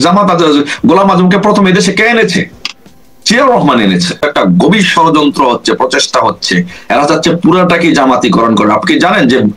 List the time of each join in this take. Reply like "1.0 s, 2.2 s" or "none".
4.2 s